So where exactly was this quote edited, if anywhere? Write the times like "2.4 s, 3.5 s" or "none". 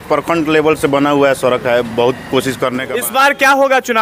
2.9 s